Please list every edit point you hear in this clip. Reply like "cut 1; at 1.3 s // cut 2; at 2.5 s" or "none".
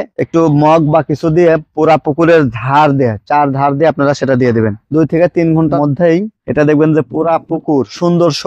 cut 1; at 4.8 s